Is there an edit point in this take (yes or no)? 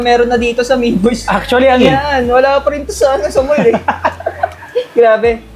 yes